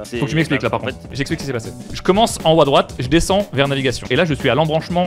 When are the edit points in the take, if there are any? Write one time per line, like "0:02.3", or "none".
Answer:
0:01.1
0:04.1